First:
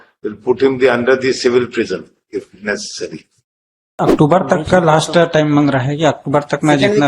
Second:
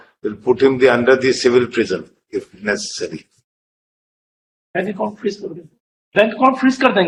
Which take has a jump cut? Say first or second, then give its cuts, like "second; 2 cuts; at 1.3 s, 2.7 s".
first; 1 cut; at 4.0 s